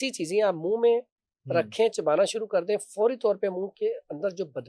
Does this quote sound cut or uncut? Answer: uncut